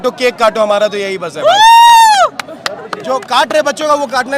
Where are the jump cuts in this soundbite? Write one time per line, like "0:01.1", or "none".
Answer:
none